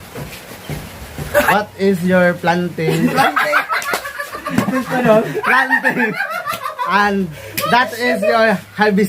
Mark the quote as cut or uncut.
cut